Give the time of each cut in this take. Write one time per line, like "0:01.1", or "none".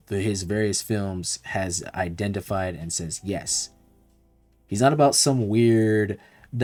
none